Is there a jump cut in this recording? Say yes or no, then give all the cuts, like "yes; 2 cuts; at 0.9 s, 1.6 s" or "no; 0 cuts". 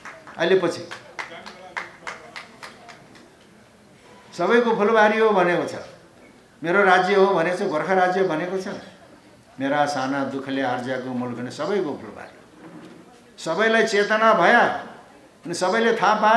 no; 0 cuts